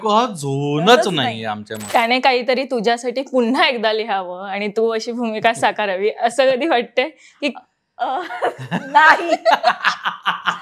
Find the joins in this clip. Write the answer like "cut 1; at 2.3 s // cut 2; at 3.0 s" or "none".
cut 1; at 1.7 s